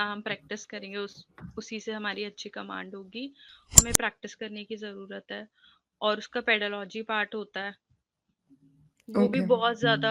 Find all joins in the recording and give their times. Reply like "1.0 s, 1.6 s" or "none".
3.8 s